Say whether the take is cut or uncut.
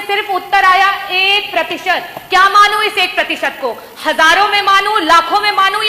uncut